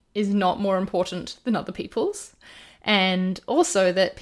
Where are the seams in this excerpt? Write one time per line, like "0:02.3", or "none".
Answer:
none